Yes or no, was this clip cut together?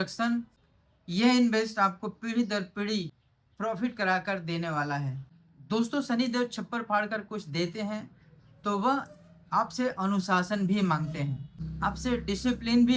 no